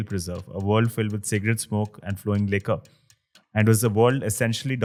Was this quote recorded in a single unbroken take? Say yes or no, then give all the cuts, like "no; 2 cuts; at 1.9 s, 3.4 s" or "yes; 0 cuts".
yes; 0 cuts